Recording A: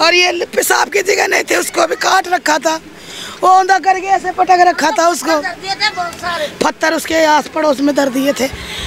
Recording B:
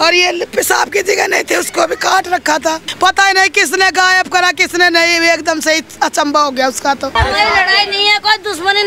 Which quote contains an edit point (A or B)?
B